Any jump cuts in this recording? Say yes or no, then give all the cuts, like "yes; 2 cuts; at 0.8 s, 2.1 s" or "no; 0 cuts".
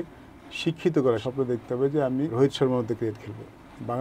yes; 2 cuts; at 1.2 s, 2.3 s